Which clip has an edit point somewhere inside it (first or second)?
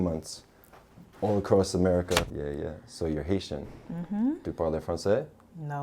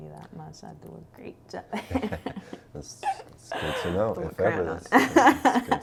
first